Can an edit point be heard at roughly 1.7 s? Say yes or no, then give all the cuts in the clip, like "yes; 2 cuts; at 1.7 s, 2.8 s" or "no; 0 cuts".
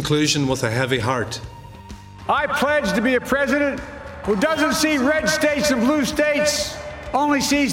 yes; 2 cuts; at 1.7 s, 4.1 s